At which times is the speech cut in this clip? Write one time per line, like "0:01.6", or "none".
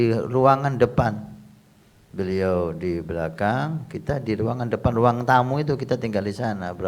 none

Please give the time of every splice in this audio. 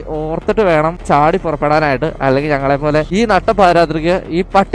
0:01.0
0:03.1

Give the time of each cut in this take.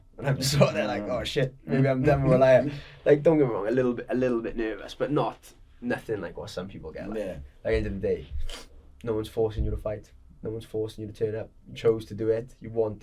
none

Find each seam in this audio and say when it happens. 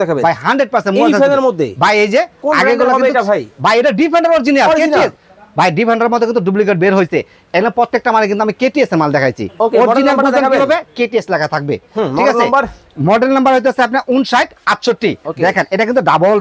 0:15.2

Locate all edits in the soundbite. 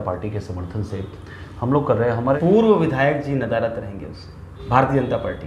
0:02.4
0:04.5

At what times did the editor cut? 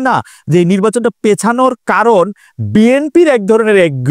none

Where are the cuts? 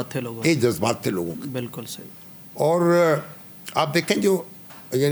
none

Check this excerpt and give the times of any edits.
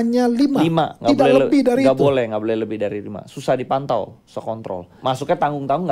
0:04.9

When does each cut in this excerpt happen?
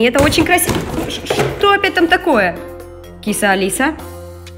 none

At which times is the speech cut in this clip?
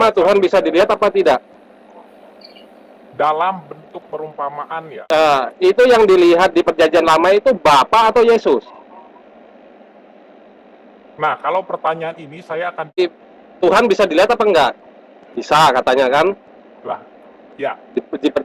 0:04.9
0:13.0

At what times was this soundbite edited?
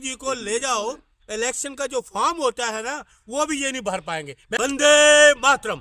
0:04.4

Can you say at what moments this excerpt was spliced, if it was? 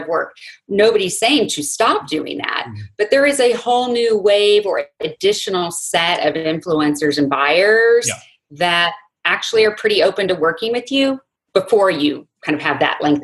0:11.3
0:12.3

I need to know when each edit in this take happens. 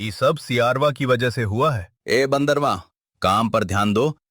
0:01.9

